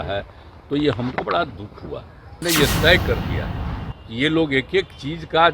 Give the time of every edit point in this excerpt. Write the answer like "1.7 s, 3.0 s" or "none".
2.4 s